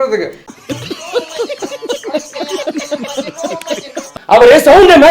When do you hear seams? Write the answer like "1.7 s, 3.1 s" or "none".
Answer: 4.1 s